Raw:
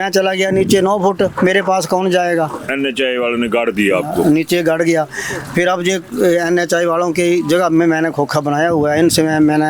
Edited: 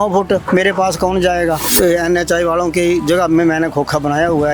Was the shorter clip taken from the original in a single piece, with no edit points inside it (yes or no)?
no